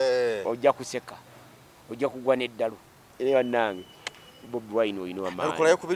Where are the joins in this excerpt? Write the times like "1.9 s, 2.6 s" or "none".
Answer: 3.1 s

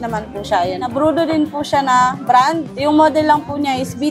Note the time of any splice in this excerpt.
0.9 s, 2.7 s

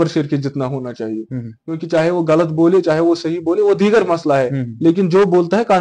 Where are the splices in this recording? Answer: none

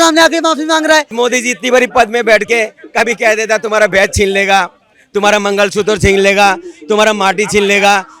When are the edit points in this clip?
1.1 s

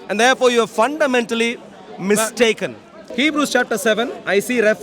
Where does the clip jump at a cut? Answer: 3.0 s

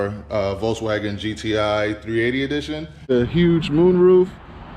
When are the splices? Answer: 3.0 s

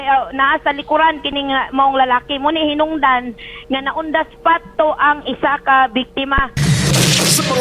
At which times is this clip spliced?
6.5 s

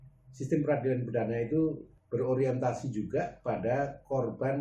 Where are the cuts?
1.9 s

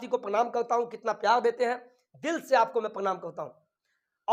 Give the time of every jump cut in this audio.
none

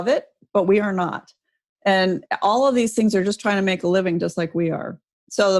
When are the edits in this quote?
none

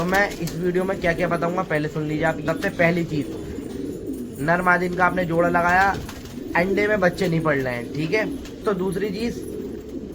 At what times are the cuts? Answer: 2.4 s, 8.8 s

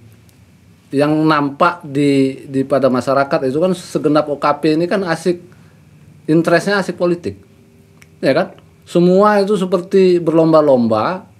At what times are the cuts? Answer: none

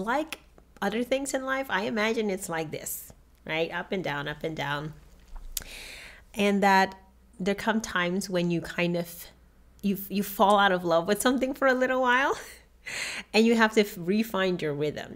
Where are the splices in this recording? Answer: none

